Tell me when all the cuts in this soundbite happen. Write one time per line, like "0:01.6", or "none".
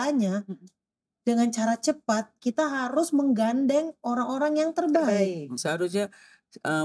0:05.6